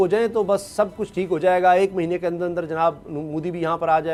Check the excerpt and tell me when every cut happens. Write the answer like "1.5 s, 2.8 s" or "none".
none

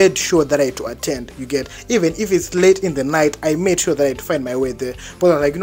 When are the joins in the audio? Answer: none

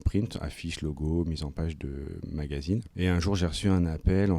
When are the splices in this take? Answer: 2.9 s

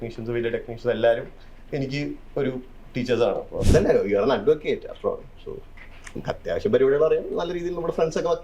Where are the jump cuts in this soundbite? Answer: 3.6 s

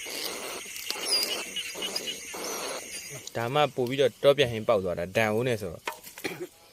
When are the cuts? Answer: 3.2 s

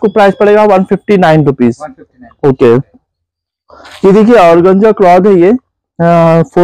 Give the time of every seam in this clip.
none

